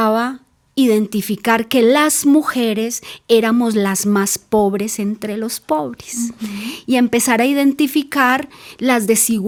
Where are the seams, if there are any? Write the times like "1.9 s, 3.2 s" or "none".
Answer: none